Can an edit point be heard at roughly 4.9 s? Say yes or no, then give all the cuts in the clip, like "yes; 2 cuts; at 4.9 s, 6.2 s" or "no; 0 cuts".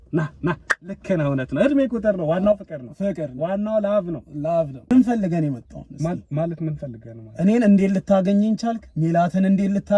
yes; 1 cut; at 4.9 s